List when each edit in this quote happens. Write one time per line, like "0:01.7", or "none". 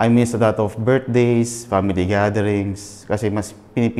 none